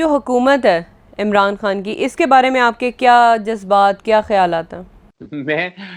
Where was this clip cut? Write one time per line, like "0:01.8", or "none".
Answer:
none